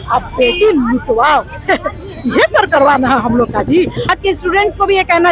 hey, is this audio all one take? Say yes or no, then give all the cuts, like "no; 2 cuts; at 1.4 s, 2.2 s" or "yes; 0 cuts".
no; 1 cut; at 4.1 s